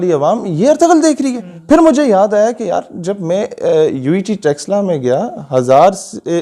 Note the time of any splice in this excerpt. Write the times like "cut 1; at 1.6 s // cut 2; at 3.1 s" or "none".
none

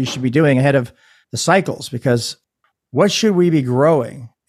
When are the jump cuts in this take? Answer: cut 1; at 2.5 s

